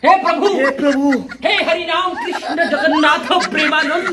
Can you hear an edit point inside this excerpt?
no; 0 cuts

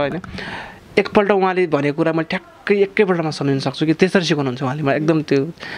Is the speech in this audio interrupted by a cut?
no; 0 cuts

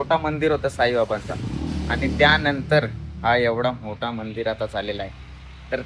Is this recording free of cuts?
yes; 0 cuts

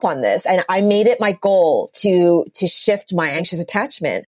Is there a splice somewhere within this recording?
yes; 1 cut; at 3.4 s

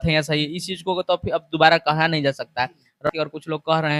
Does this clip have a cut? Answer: yes; 1 cut; at 3.1 s

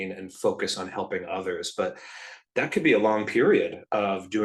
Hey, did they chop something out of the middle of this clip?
no; 0 cuts

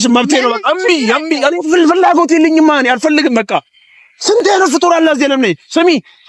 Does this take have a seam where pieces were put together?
no; 0 cuts

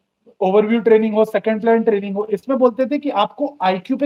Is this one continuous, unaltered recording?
yes; 0 cuts

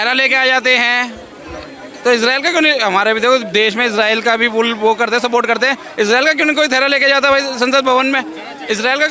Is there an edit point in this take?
no; 0 cuts

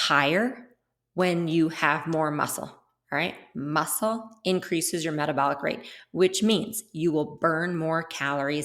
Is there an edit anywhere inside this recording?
no; 0 cuts

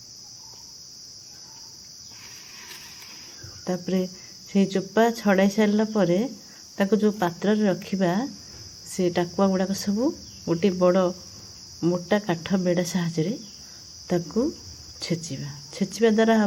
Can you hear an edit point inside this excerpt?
no; 0 cuts

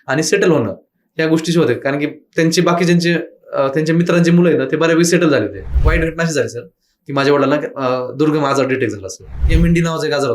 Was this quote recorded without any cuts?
no; 2 cuts; at 5.8 s, 9.4 s

